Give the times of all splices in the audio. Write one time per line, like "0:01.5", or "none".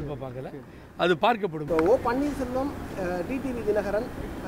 0:01.6